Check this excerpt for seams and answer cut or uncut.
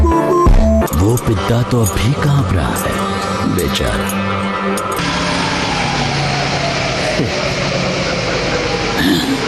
cut